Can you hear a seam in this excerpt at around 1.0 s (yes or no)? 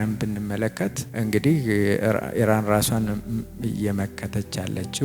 yes